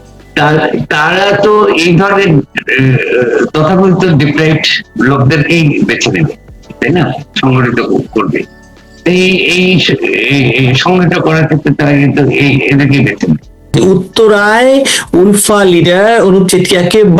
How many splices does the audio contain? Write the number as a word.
one